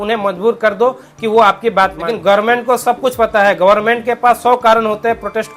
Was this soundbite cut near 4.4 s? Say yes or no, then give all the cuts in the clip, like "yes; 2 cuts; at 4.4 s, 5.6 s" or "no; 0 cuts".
no; 1 cut; at 2.1 s